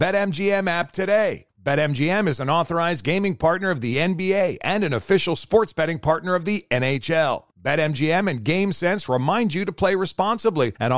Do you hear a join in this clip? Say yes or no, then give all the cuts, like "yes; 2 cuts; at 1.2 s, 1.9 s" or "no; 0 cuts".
no; 0 cuts